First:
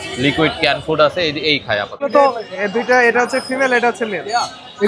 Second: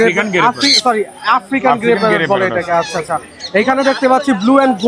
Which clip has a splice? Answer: first; 1 cut; at 2.1 s

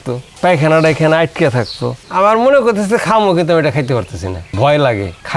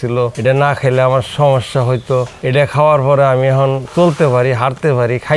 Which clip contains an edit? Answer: first; 1 cut; at 2.0 s

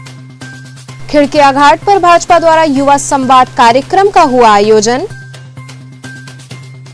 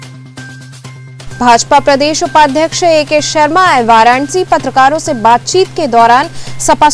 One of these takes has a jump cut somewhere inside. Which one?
second; 1 cut; at 1.3 s

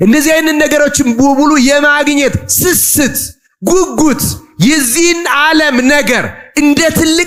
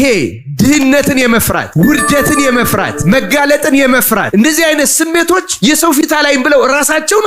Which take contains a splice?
second; 4 cuts; at 1.2 s, 2.9 s, 4.3 s, 6.0 s

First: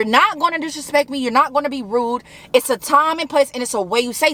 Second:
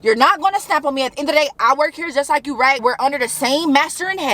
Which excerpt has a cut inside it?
second; 1 cut; at 2.8 s

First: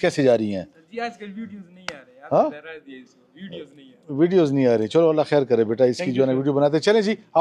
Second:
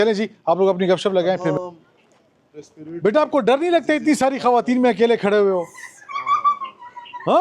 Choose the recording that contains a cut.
second; 2 cuts; at 1.5 s, 3.8 s

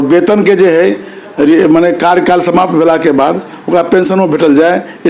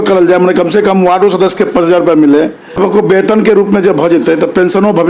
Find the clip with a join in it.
second; 1 cut; at 2.8 s

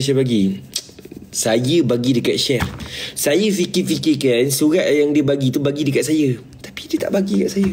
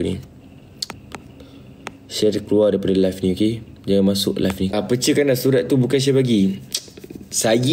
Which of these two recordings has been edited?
second; 2 cuts; at 0.9 s, 4.7 s

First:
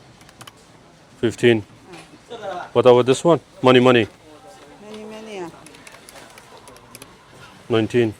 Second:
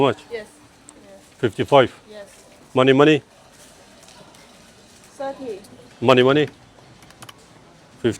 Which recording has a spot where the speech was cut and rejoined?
second; 2 cuts; at 3.4 s, 5.8 s

